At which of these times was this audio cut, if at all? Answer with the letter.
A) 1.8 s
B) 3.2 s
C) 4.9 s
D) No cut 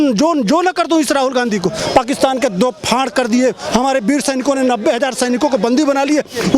A